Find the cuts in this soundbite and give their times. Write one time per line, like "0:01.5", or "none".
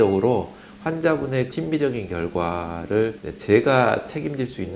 0:01.5
0:03.3